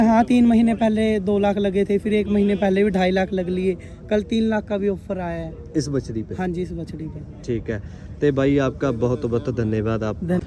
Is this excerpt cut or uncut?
uncut